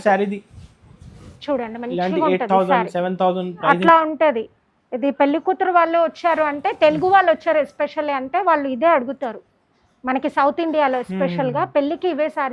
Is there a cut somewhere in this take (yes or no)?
no